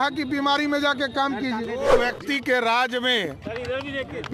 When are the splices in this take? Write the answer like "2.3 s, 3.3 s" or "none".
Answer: 2.0 s